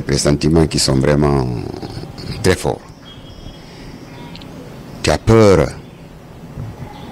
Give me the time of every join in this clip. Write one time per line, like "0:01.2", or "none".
none